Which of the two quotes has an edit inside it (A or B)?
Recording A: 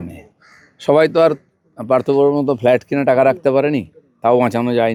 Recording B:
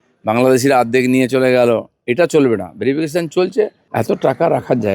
B